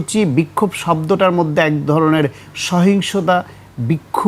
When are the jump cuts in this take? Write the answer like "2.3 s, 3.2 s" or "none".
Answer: none